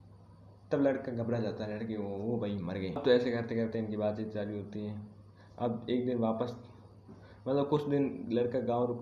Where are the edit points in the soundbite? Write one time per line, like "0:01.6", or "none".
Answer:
0:03.0